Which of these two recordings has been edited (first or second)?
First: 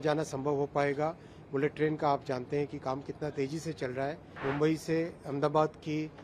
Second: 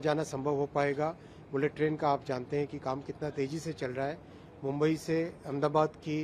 first